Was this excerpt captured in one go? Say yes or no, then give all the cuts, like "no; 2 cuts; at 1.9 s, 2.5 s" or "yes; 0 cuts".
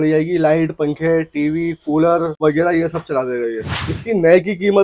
no; 2 cuts; at 2.4 s, 3.8 s